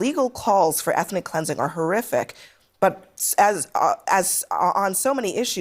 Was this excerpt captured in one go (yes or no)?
yes